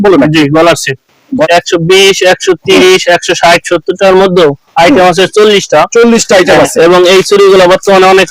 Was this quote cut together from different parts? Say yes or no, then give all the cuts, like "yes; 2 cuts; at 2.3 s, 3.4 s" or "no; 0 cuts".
yes; 1 cut; at 1.5 s